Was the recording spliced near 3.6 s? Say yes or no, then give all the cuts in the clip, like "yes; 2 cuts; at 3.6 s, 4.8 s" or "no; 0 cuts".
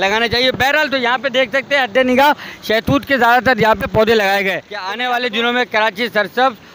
no; 1 cut; at 5.0 s